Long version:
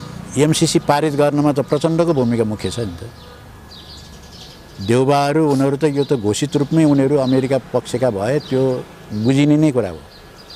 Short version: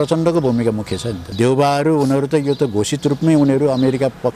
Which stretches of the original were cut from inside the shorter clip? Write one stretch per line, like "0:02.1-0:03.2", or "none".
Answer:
0:02.9-0:04.7